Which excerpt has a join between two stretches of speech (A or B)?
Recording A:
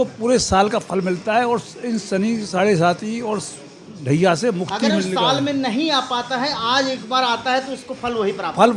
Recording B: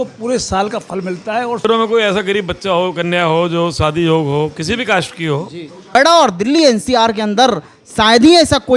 B